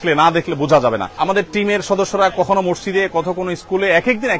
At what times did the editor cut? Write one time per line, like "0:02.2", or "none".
0:01.1